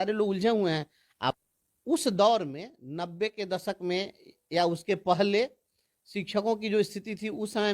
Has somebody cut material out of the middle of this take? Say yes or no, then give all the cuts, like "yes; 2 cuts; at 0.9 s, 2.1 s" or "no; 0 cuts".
yes; 1 cut; at 1.3 s